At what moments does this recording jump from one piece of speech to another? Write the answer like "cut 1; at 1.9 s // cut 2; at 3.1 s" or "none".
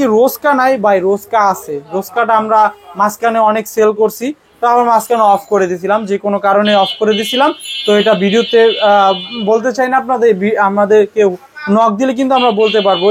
none